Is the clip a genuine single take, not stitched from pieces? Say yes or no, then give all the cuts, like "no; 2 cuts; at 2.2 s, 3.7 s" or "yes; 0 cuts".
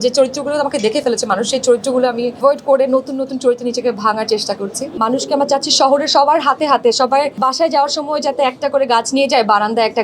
no; 3 cuts; at 2.4 s, 5.0 s, 7.3 s